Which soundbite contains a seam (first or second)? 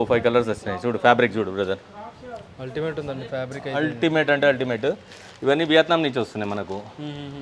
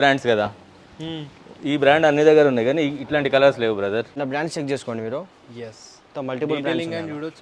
second